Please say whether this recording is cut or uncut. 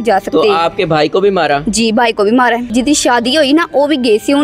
cut